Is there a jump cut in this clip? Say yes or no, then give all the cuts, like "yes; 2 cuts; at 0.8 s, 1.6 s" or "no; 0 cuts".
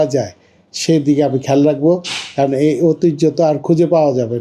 no; 0 cuts